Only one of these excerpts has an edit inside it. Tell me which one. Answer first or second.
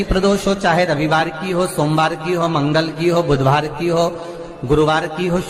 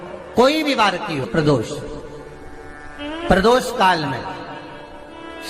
second